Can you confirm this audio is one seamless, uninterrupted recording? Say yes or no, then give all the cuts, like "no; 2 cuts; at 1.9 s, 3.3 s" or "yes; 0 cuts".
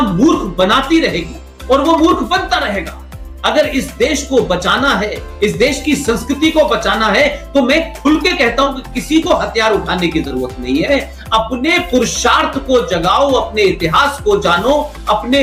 yes; 0 cuts